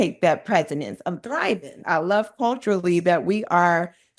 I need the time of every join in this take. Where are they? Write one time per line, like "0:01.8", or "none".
0:01.8